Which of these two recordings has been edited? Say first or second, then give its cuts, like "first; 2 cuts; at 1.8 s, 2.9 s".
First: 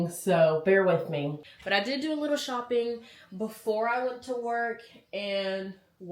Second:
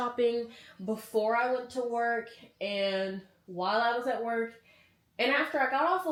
first; 1 cut; at 1.5 s